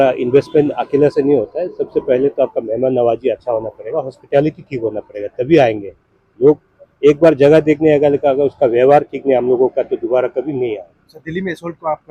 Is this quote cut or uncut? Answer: uncut